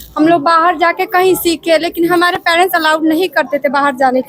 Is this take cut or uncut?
uncut